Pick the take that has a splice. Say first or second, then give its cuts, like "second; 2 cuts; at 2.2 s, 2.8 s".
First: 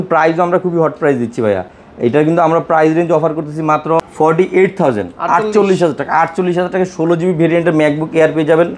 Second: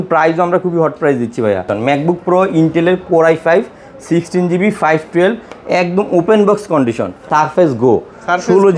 second; 2 cuts; at 1.7 s, 7.2 s